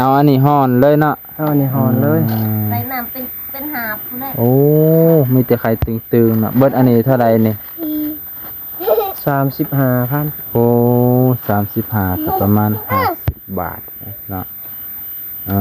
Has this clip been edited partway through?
no; 0 cuts

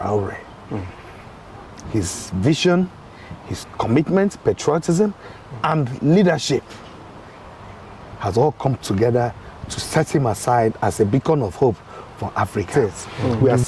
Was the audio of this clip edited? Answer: yes; 1 cut; at 12.7 s

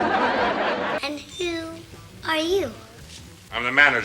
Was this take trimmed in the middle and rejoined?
yes; 1 cut; at 1.0 s

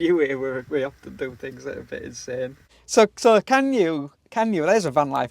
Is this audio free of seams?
no; 1 cut; at 2.8 s

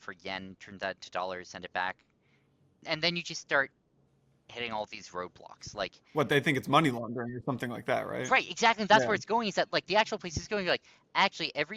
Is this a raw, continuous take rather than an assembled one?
no; 2 cuts; at 2.8 s, 6.0 s

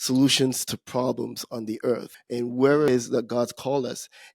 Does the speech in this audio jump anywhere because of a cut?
yes; 2 cuts; at 2.1 s, 2.9 s

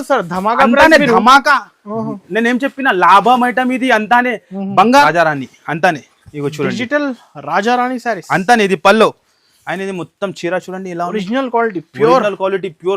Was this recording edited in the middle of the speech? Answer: yes; 1 cut; at 5.0 s

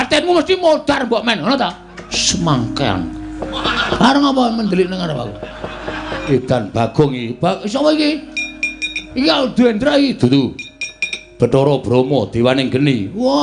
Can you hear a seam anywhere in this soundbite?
yes; 3 cuts; at 2.2 s, 3.8 s, 6.2 s

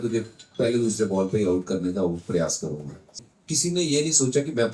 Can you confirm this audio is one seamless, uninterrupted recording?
no; 1 cut; at 3.2 s

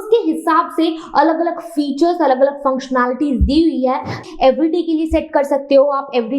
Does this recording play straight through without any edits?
no; 1 cut; at 4.2 s

